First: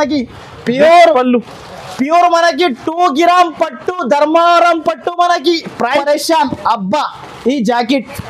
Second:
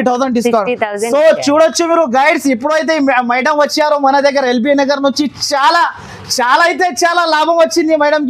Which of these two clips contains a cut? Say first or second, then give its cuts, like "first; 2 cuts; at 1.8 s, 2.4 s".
first; 1 cut; at 6.0 s